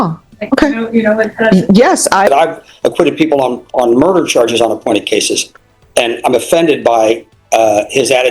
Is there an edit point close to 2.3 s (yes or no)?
yes